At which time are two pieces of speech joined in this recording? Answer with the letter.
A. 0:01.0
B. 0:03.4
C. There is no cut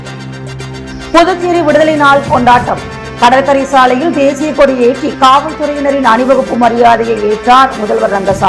A